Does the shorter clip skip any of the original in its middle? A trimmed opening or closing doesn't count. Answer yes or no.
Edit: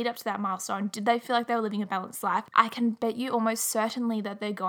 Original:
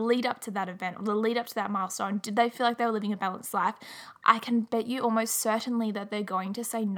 yes